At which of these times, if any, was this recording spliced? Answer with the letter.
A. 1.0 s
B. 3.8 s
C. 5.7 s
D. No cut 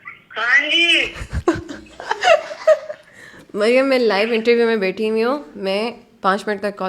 D